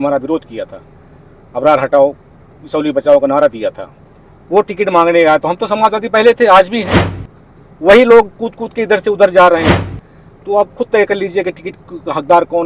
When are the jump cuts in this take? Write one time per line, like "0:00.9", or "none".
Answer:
none